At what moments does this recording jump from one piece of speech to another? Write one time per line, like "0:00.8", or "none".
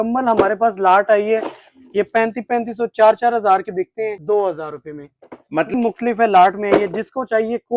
0:04.2
0:05.7